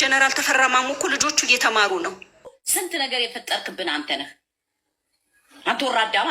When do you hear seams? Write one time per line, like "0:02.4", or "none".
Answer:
0:02.6